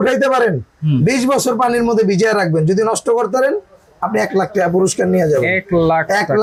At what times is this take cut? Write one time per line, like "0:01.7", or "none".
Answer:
none